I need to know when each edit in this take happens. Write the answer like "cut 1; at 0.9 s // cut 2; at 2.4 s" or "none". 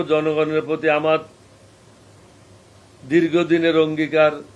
none